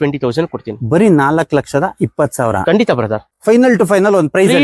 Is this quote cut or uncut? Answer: cut